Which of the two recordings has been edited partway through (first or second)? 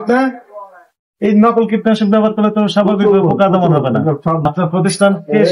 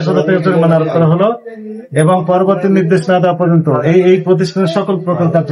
first